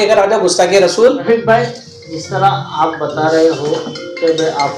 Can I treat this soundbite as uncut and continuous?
no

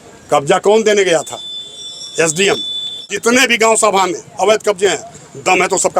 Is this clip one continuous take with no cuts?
no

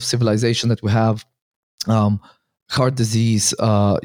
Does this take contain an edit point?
no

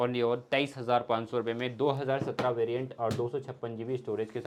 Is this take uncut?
yes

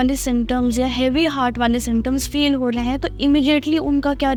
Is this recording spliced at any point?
no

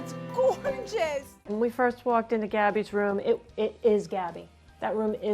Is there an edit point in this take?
yes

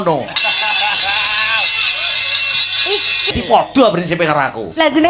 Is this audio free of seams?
no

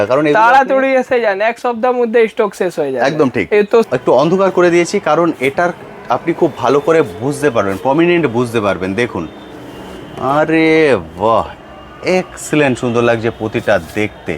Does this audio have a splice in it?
yes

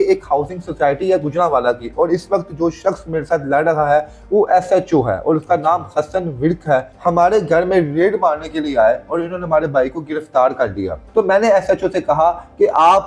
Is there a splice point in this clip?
yes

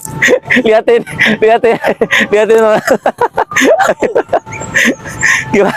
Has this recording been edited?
no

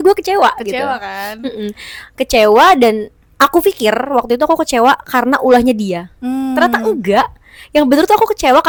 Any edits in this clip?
no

